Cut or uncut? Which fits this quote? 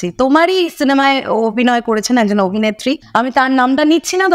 cut